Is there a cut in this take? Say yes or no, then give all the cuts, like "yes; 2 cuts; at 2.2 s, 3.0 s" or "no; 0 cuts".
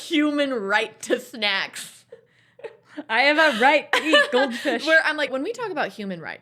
yes; 1 cut; at 5.3 s